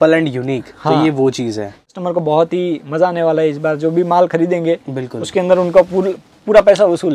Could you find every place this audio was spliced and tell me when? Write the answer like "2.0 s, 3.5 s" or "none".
1.9 s